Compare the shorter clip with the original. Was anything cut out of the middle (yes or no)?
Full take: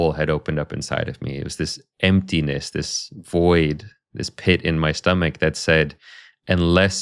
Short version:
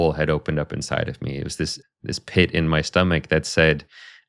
yes